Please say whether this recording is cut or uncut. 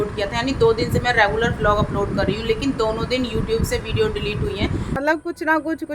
cut